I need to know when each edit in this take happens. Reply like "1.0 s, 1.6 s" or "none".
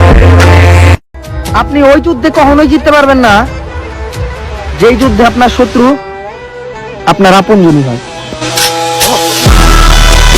1.1 s